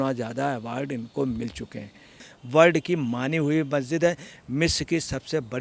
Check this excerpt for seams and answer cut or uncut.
cut